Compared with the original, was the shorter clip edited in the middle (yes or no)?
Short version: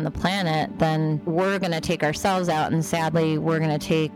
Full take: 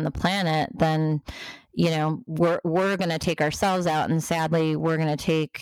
yes